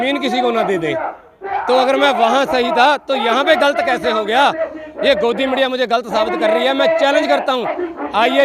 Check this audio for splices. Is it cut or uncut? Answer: uncut